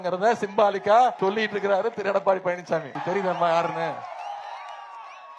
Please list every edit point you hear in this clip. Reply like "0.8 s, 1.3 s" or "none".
1.2 s, 2.9 s